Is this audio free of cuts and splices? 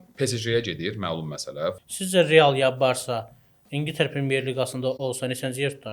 no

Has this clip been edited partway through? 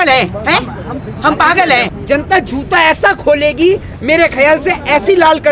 yes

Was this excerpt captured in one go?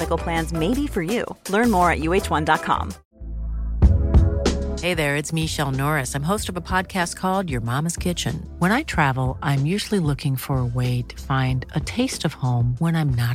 no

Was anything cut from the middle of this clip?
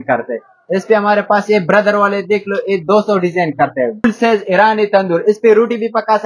yes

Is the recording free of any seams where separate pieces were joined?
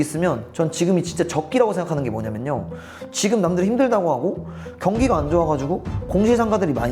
yes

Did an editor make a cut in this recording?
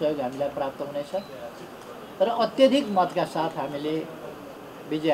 no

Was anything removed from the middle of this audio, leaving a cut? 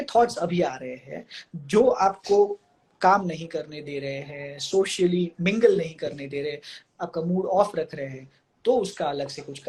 no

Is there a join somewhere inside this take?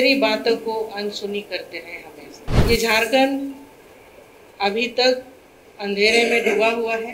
yes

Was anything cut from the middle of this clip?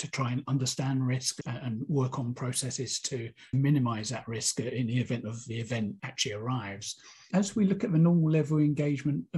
yes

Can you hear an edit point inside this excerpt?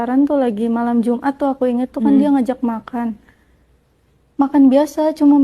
no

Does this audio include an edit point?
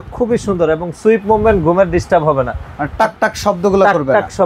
no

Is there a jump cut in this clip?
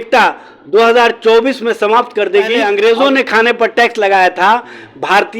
yes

